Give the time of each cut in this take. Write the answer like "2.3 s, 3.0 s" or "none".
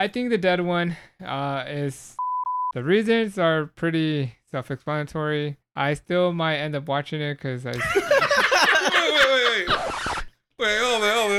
2.4 s, 5.6 s